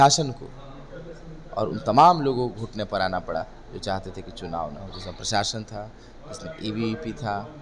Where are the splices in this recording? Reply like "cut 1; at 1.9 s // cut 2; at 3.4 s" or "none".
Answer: none